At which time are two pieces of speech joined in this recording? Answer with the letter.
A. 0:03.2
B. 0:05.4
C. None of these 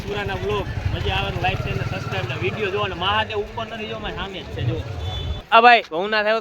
B